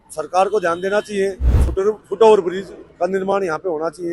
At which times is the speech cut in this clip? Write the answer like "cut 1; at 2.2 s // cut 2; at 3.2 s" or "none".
cut 1; at 1.7 s